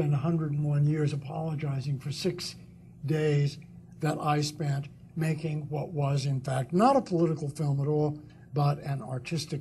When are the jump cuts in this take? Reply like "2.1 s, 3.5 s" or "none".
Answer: 8.0 s